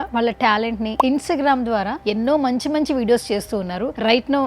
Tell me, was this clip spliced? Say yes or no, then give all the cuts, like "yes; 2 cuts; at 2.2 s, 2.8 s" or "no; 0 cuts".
yes; 2 cuts; at 1.0 s, 2.0 s